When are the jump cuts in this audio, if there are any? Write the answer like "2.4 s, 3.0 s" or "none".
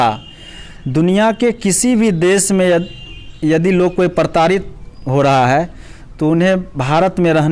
none